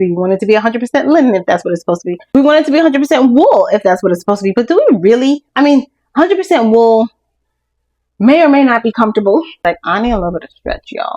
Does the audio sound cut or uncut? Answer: cut